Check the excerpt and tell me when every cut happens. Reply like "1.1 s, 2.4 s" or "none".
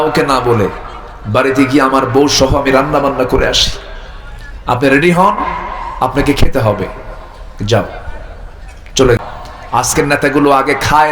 9.2 s